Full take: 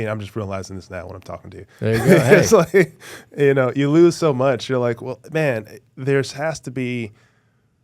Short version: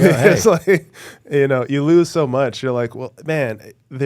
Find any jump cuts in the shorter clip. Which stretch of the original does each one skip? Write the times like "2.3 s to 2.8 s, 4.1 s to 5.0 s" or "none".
none